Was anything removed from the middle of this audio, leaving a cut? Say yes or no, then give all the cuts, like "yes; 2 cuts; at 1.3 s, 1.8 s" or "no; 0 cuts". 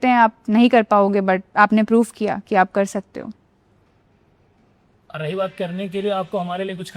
yes; 1 cut; at 1.5 s